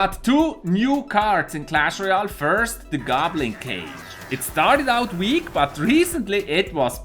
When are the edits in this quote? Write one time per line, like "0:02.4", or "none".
0:05.5